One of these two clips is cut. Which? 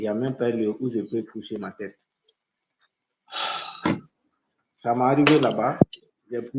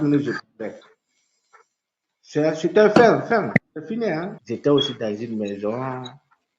second; 1 cut; at 4.4 s

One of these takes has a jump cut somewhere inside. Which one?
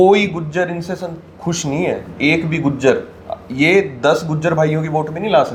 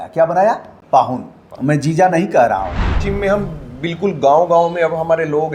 second; 1 cut; at 3.0 s

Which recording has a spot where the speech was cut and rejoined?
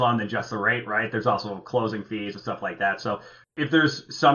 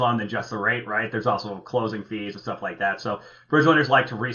first; 1 cut; at 3.4 s

